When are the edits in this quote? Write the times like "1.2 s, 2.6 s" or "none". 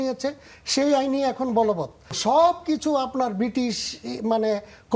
2.1 s

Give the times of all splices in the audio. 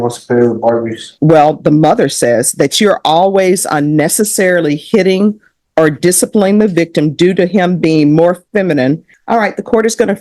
1.0 s, 9.1 s

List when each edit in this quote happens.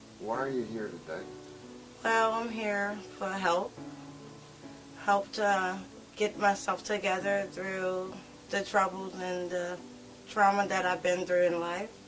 10.2 s

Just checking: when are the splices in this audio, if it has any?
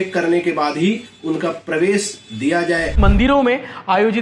3.0 s

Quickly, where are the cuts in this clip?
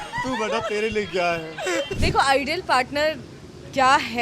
1.9 s

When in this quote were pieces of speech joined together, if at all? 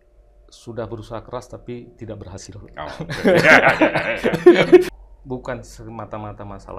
4.9 s

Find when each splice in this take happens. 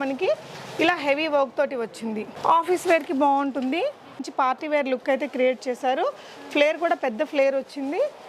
4.2 s

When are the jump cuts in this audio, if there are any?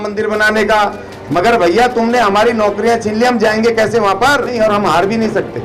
4.5 s

